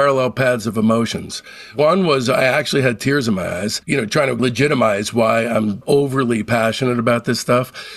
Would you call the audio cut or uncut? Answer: uncut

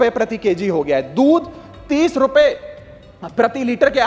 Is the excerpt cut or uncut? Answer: uncut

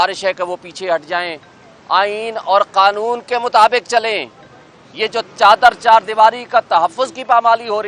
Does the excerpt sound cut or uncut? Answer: uncut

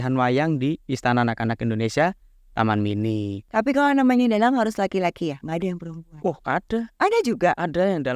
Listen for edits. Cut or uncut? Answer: cut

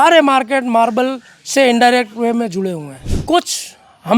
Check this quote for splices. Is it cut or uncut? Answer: cut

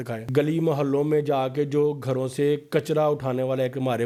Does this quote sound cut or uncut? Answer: uncut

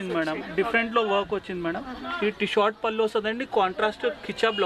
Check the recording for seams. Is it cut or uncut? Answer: uncut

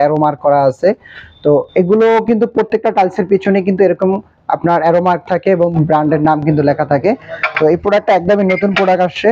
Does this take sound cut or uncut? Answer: uncut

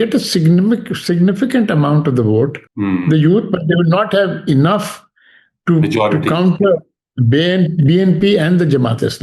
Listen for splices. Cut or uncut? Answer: cut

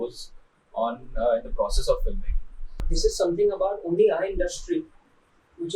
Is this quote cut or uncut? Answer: cut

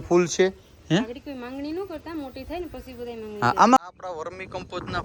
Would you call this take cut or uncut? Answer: cut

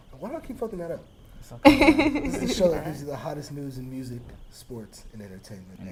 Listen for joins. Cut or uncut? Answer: uncut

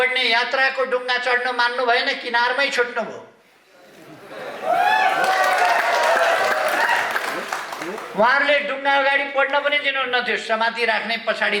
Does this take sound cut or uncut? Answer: uncut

